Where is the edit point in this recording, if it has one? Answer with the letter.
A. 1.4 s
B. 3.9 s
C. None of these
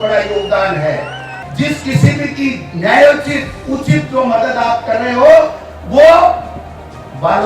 A